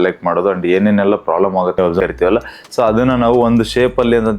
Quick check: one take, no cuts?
no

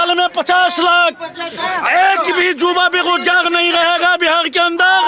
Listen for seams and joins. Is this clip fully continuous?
yes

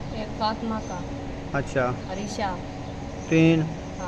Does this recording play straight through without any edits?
yes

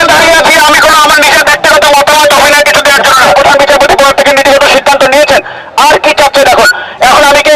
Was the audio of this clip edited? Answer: yes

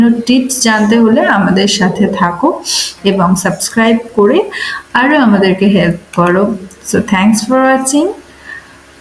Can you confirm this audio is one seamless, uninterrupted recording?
yes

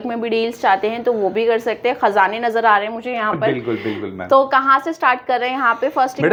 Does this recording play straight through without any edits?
yes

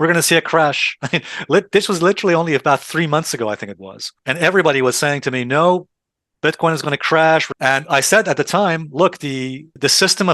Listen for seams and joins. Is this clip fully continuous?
yes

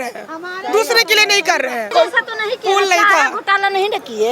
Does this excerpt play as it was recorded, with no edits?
no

